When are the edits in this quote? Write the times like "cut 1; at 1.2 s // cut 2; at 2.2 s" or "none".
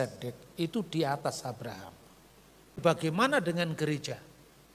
cut 1; at 2.8 s